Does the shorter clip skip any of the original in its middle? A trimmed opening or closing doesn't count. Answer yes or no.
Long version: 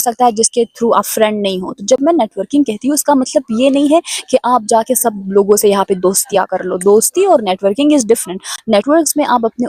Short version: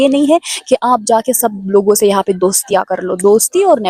no